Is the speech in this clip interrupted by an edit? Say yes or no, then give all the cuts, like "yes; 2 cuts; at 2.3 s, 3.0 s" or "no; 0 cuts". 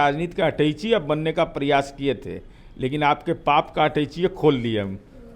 no; 0 cuts